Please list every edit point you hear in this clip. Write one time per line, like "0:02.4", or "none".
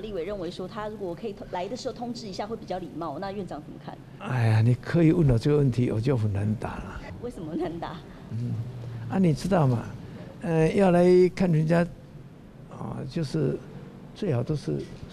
0:04.1
0:07.1